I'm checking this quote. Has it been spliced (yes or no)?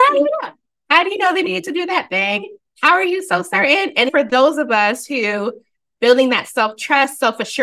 yes